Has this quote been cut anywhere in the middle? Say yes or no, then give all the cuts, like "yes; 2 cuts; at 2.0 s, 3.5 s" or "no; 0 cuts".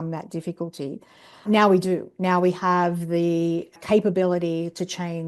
yes; 2 cuts; at 1.4 s, 3.7 s